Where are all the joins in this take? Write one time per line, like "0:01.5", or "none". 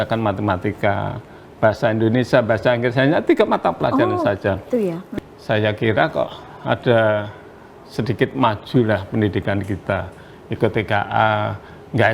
0:05.0